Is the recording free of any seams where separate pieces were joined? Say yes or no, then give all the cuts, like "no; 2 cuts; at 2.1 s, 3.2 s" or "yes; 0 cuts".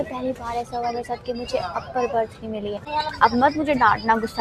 no; 1 cut; at 2.8 s